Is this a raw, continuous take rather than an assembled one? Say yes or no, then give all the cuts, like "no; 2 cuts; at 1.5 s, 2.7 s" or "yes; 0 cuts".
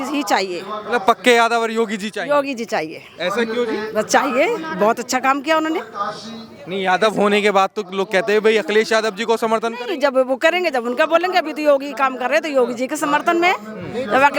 yes; 0 cuts